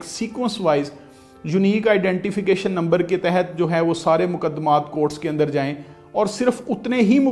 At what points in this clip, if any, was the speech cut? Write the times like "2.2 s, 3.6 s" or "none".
none